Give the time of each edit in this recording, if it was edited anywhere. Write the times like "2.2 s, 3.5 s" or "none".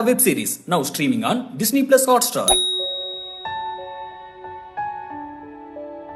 none